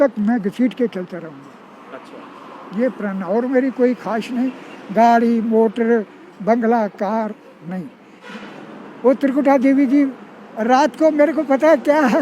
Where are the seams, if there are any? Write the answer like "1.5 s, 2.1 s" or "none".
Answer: 8.3 s